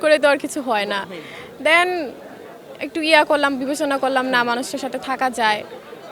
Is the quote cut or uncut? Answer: uncut